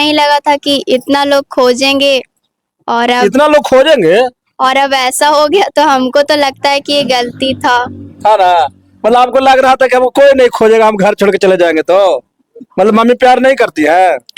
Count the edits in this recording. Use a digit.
0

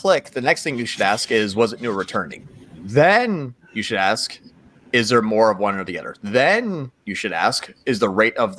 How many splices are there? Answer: 0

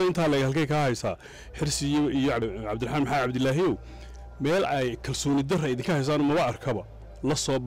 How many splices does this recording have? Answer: 1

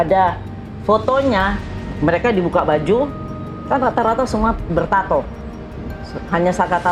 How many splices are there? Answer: 0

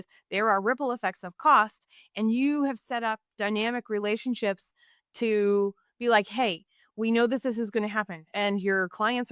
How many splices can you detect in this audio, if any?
0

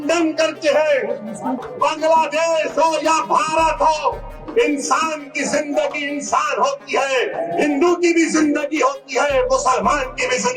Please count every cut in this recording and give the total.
1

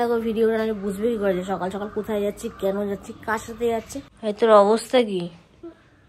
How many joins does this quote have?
1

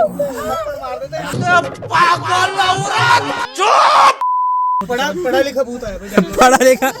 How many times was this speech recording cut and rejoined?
1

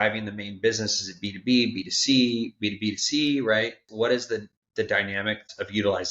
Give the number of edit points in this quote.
1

